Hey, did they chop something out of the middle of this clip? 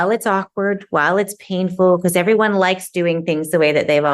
no; 0 cuts

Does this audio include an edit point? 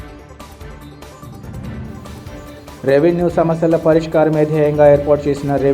yes; 1 cut; at 1.6 s

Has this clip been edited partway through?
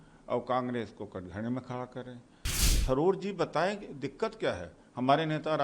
yes; 1 cut; at 2.6 s

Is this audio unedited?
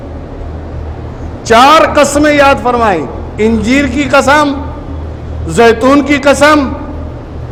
yes; 0 cuts

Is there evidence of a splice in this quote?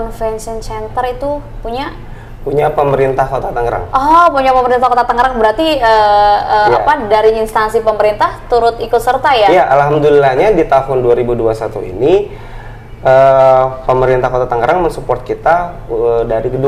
no; 0 cuts

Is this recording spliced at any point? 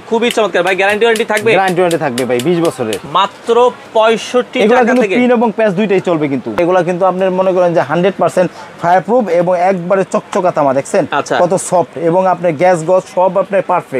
yes; 2 cuts; at 3.1 s, 6.6 s

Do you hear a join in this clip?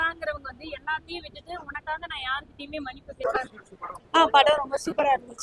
yes; 1 cut; at 3.2 s

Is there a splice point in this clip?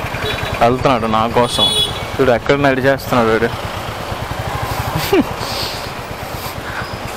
no; 0 cuts

